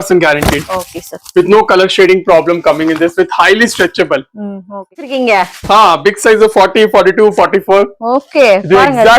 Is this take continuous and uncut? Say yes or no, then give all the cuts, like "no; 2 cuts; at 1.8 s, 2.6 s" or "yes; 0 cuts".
no; 1 cut; at 5.0 s